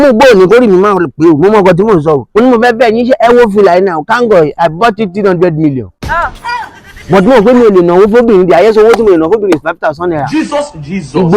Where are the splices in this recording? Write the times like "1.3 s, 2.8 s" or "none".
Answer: 2.3 s